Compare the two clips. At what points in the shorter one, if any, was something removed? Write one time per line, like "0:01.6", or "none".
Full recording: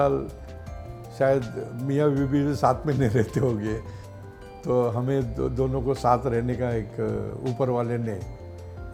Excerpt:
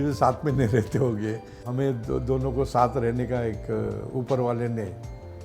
0:01.7